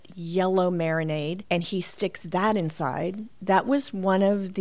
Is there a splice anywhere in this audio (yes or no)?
yes